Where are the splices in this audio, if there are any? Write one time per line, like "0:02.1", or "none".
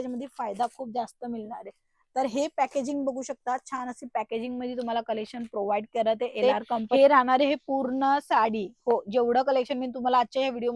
0:06.4